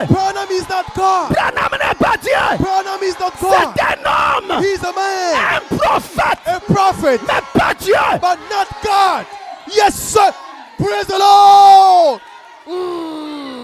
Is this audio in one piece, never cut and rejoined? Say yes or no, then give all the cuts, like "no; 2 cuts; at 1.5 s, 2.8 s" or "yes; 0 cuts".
yes; 0 cuts